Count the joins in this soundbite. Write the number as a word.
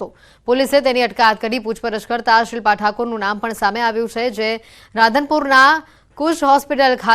one